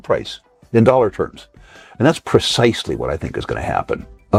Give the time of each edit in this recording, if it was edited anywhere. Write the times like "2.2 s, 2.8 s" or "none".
none